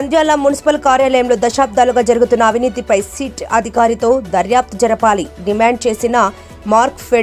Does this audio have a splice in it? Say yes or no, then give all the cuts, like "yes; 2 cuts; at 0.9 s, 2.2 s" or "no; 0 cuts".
no; 0 cuts